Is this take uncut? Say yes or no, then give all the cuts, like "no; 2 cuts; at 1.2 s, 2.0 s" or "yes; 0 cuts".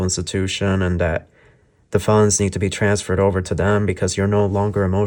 yes; 0 cuts